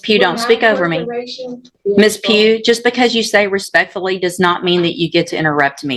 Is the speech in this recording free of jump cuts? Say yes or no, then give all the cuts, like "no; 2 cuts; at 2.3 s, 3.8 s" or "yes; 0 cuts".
no; 1 cut; at 1.7 s